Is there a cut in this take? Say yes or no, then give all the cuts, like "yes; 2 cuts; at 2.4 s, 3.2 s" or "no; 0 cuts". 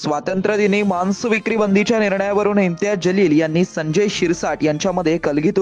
no; 0 cuts